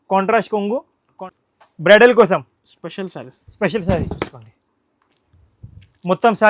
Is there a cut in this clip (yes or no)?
yes